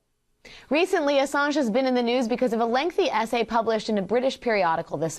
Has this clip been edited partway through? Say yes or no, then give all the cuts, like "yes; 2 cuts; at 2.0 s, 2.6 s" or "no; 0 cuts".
yes; 1 cut; at 1.8 s